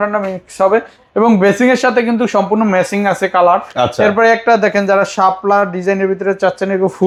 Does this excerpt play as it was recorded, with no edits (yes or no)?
yes